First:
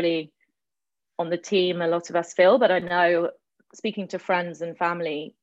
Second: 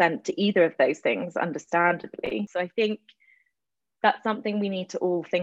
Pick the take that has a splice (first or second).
second